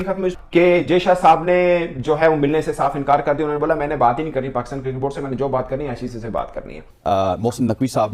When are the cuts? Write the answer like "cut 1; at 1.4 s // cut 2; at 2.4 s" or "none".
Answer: cut 1; at 6.8 s

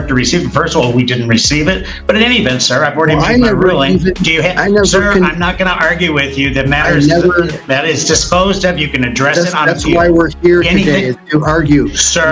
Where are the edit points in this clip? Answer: none

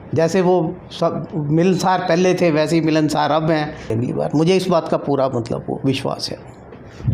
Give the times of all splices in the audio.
cut 1; at 3.9 s

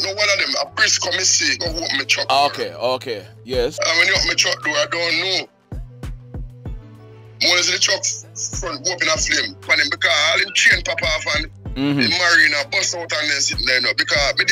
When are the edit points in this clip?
cut 1; at 3.7 s // cut 2; at 9.6 s

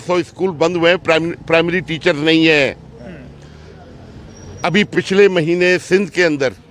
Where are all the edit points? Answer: none

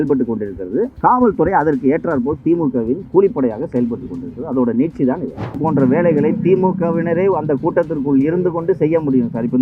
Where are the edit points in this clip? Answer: cut 1; at 5.6 s

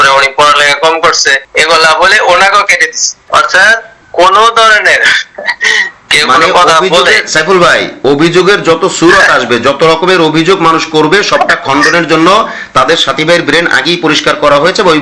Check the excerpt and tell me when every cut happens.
none

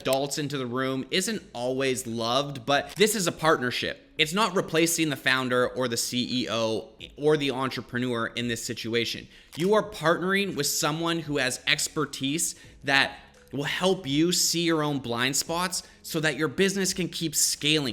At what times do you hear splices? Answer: cut 1; at 2.9 s

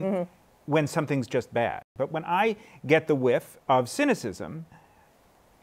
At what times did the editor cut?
cut 1; at 1.8 s // cut 2; at 3.5 s

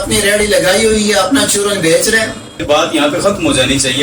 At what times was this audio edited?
cut 1; at 2.6 s

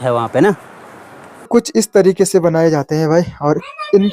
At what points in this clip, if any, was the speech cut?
cut 1; at 1.0 s

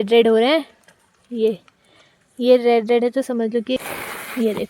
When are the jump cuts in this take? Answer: cut 1; at 3.8 s

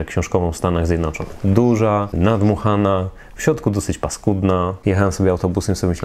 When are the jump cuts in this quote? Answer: cut 1; at 2.1 s // cut 2; at 4.8 s

